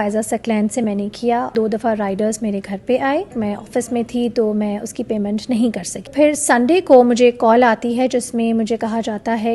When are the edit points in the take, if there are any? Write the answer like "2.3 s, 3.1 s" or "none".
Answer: 1.5 s, 3.4 s, 6.1 s